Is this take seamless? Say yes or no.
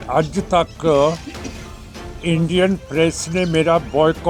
yes